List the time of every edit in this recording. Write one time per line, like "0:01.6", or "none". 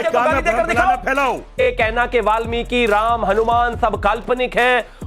0:01.6